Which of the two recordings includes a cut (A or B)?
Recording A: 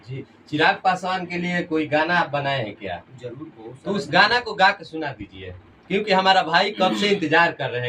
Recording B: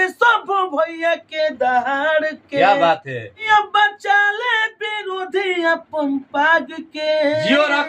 B